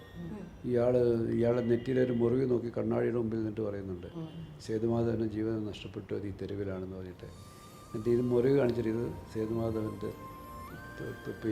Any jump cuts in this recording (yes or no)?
no